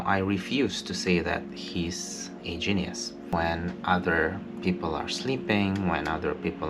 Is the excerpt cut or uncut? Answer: cut